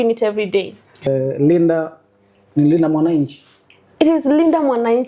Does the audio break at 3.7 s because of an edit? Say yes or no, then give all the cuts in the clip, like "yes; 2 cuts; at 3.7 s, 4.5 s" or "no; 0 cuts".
no; 1 cut; at 1.1 s